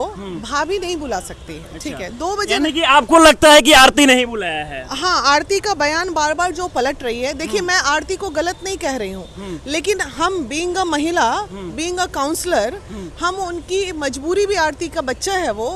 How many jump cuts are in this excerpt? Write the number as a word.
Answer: zero